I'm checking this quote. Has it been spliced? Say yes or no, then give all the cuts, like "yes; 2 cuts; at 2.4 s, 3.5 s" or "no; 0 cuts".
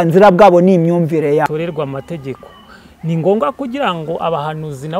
yes; 1 cut; at 1.6 s